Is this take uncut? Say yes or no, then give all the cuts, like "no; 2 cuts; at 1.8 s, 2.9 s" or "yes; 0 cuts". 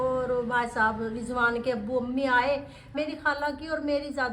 no; 1 cut; at 2.9 s